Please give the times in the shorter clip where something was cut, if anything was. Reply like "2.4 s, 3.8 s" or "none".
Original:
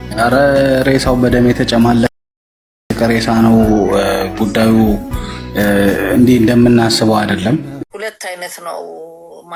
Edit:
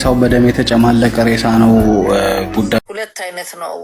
1.1 s, 2.8 s